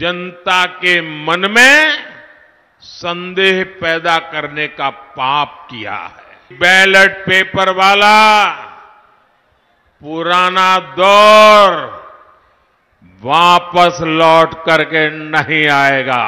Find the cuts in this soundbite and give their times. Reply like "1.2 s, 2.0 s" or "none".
6.5 s